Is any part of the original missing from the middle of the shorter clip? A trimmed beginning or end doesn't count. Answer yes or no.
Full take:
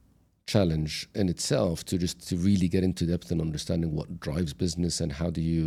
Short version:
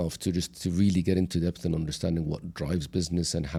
no